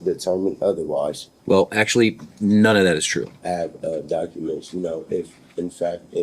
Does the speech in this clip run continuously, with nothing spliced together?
no; 2 cuts; at 1.3 s, 3.3 s

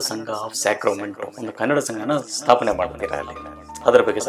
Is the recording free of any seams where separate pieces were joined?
no; 1 cut; at 1.3 s

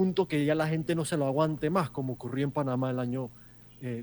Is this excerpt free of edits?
yes; 0 cuts

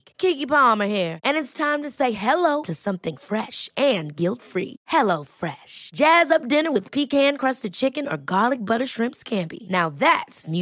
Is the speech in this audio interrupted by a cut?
no; 0 cuts

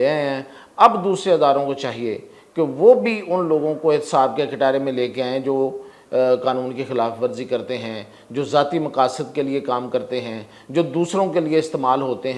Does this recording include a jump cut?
no; 0 cuts

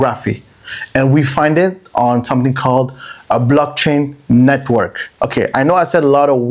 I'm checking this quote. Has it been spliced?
no; 0 cuts

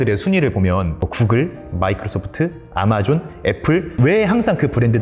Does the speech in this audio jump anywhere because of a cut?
yes; 2 cuts; at 0.9 s, 4.0 s

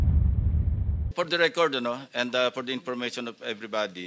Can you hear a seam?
yes; 1 cut; at 1.1 s

